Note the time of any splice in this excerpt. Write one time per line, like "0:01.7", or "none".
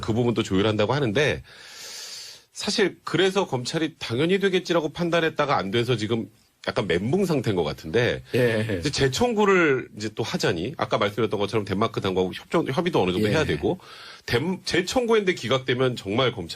0:14.0